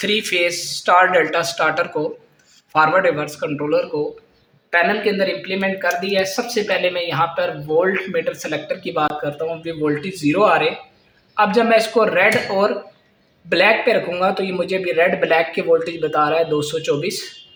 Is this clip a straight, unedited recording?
yes; 0 cuts

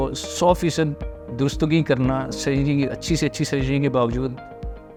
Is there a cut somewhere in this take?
no; 0 cuts

